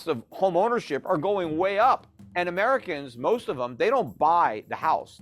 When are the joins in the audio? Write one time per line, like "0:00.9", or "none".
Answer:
0:02.2